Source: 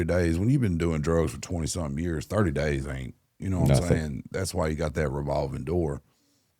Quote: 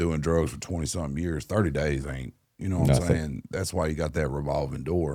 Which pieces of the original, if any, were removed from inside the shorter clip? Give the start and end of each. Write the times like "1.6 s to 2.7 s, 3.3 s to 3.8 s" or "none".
none